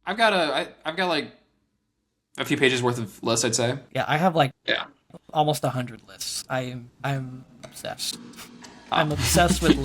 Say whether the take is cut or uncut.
cut